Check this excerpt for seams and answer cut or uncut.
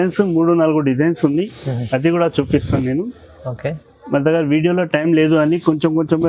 uncut